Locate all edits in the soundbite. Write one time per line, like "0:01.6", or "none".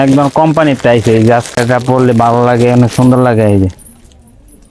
0:01.6